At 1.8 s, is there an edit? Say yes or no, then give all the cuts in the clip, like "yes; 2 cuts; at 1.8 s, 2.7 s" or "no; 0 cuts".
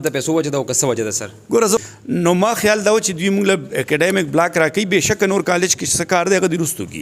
yes; 1 cut; at 1.8 s